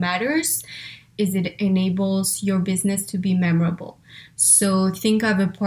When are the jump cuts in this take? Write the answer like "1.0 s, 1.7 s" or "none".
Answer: 1.1 s